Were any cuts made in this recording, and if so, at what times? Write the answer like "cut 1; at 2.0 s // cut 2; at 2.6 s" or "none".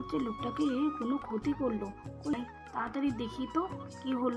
cut 1; at 2.3 s